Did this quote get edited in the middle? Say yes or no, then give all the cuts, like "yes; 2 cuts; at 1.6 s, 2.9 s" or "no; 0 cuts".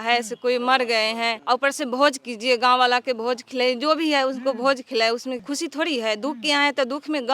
yes; 2 cuts; at 1.4 s, 5.4 s